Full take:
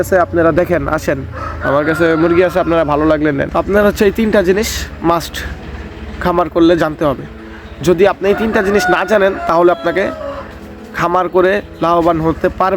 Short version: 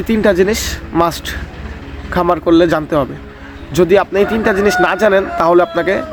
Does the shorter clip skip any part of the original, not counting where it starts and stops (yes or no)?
no